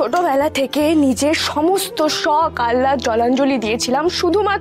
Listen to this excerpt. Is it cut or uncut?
uncut